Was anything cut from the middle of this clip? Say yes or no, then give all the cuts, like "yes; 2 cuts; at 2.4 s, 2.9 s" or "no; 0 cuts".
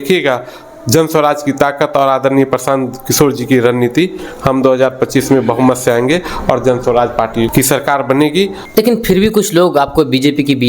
yes; 1 cut; at 8.6 s